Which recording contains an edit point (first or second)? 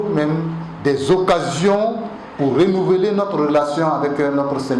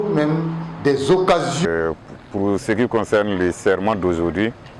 second